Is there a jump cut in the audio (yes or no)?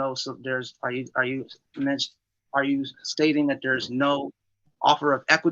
no